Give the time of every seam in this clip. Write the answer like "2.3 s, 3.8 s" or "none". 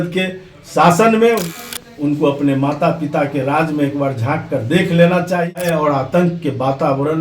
1.6 s, 5.5 s